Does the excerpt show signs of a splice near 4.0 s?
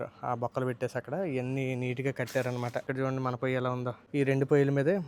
yes; 2 cuts; at 2.9 s, 4.0 s

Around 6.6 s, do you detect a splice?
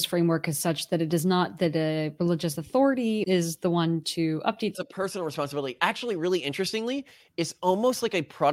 no; 2 cuts; at 3.2 s, 4.7 s

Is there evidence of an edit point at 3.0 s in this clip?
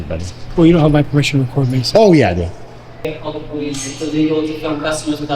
yes; 1 cut; at 3.0 s

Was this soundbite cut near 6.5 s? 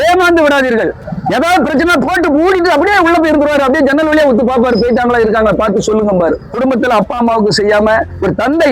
yes; 2 cuts; at 1.0 s, 6.5 s

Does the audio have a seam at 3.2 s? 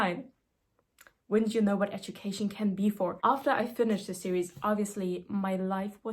yes; 1 cut; at 3.2 s

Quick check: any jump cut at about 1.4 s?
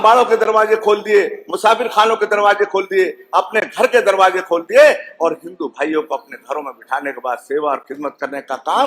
no; 0 cuts

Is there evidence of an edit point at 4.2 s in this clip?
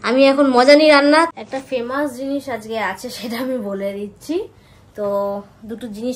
no; 1 cut; at 1.3 s

